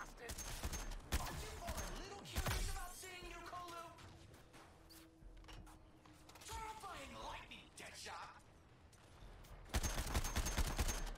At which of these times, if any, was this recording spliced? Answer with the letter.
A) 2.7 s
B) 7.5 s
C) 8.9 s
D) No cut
D